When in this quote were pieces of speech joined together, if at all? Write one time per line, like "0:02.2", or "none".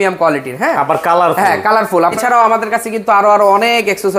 0:02.2